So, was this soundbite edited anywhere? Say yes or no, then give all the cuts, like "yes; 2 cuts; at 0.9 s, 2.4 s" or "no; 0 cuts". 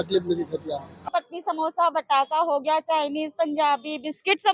yes; 1 cut; at 0.9 s